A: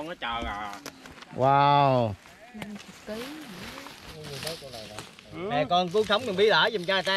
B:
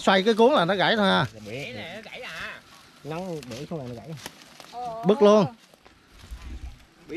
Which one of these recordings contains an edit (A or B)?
A